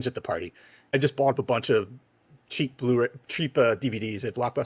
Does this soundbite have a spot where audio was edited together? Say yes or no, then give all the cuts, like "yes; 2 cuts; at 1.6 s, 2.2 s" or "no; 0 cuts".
yes; 1 cut; at 0.9 s